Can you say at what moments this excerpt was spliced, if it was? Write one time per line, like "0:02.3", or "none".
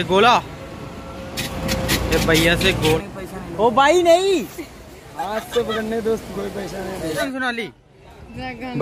0:02.8
0:07.2